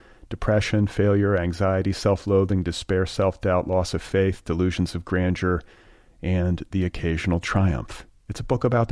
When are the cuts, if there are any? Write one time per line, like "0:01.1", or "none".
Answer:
none